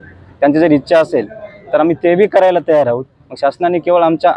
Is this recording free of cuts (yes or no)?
yes